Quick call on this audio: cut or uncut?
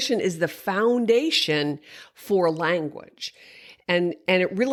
uncut